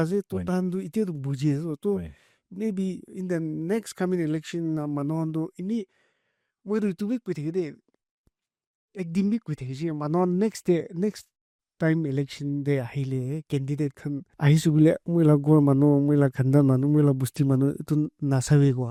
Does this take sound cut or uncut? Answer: uncut